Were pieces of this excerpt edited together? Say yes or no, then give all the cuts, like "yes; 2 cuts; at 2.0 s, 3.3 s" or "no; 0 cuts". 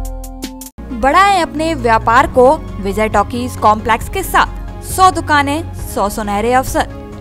no; 0 cuts